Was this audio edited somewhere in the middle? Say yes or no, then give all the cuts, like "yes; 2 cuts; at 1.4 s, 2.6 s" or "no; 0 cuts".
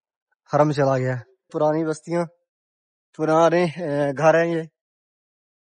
yes; 1 cut; at 1.5 s